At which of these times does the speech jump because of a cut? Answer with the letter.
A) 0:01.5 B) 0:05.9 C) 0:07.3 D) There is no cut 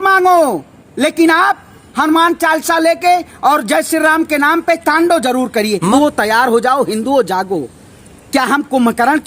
B